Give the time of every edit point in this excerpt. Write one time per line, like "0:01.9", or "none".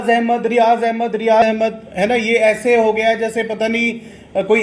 0:01.4